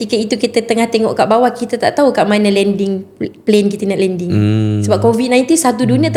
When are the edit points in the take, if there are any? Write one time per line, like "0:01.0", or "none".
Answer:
none